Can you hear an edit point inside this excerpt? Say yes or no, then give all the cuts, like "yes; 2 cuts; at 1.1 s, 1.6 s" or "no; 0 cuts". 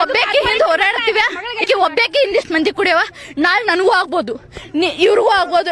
yes; 1 cut; at 1.6 s